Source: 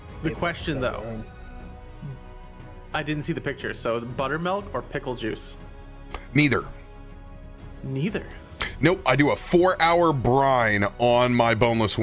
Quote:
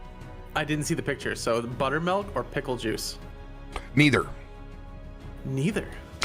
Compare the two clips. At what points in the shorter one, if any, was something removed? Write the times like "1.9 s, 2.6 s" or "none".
none